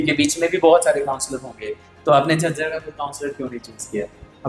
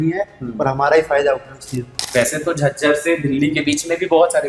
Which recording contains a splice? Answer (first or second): second